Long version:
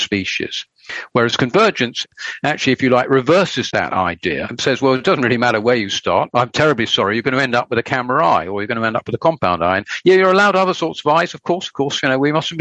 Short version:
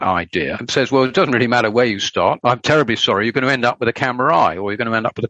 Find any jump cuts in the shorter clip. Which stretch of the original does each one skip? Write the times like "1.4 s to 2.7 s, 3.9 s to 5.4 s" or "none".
none